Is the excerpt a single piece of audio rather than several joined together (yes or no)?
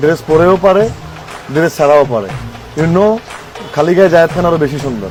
yes